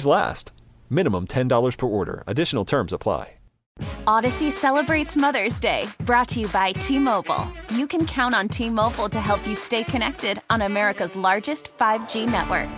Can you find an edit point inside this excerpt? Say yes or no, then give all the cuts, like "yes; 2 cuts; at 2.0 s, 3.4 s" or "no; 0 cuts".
yes; 1 cut; at 3.8 s